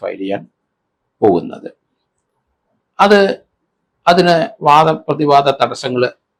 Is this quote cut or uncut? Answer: uncut